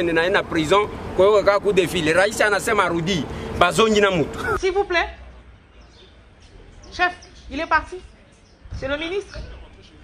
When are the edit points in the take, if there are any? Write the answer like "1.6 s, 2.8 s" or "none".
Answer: 4.5 s